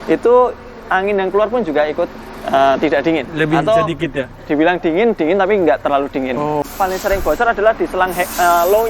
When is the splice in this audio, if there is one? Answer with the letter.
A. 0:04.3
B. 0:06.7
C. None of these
B